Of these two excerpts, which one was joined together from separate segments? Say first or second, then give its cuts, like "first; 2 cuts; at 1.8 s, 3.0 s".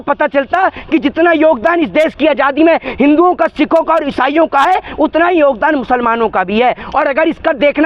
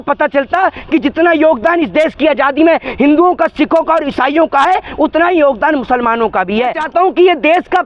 second; 1 cut; at 6.8 s